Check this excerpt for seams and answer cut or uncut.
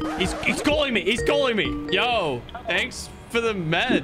cut